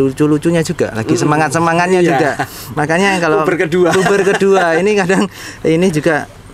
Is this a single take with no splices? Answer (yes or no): yes